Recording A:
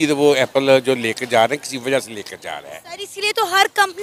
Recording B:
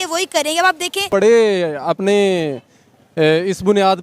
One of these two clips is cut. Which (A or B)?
B